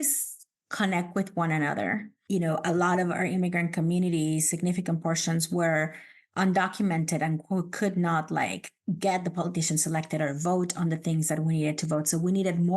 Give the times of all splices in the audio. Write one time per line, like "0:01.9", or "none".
0:02.1